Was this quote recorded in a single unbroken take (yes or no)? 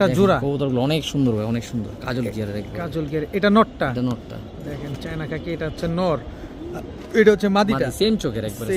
yes